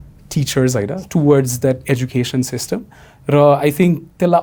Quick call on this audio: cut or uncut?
uncut